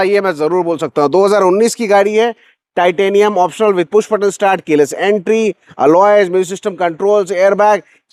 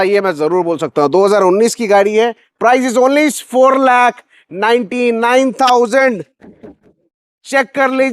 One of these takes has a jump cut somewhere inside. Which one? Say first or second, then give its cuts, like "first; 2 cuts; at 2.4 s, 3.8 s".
second; 1 cut; at 2.5 s